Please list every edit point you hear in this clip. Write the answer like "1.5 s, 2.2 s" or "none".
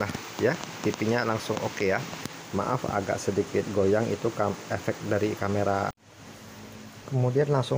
6.0 s